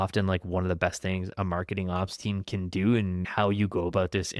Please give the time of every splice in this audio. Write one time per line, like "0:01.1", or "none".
0:03.3